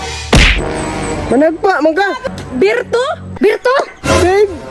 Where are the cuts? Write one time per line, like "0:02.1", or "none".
0:02.2
0:03.2